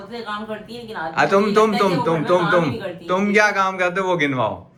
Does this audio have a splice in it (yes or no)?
no